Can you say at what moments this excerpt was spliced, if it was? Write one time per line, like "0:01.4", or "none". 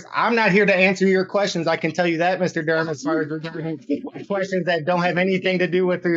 none